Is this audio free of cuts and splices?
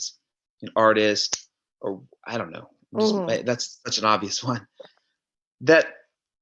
yes; 0 cuts

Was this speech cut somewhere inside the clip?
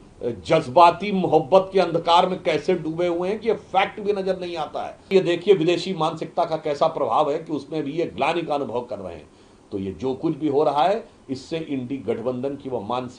yes; 1 cut; at 5.1 s

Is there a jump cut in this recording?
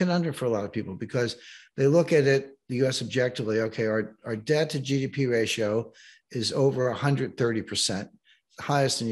no; 0 cuts

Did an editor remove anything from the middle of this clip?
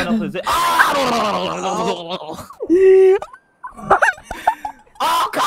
no; 0 cuts

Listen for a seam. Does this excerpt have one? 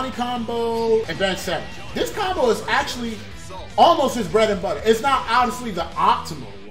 yes; 1 cut; at 1.1 s

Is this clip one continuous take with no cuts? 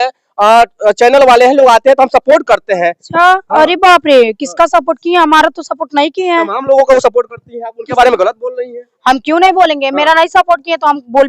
yes; 0 cuts

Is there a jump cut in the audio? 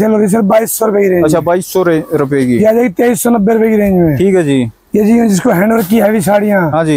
no; 0 cuts

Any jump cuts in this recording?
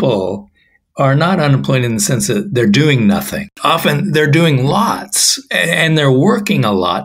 yes; 1 cut; at 3.4 s

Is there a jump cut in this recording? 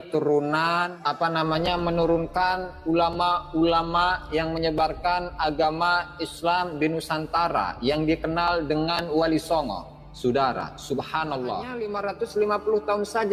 yes; 2 cuts; at 1.0 s, 11.9 s

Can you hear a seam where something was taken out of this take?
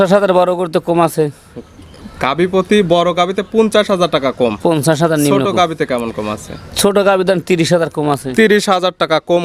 no; 0 cuts

